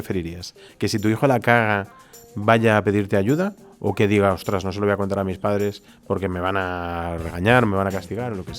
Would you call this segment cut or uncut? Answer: uncut